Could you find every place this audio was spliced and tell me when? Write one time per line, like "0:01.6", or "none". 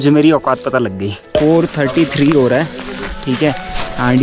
0:01.2